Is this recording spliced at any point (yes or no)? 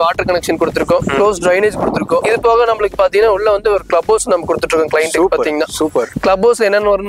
no